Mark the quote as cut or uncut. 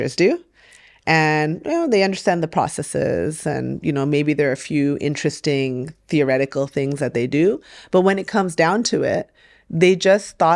uncut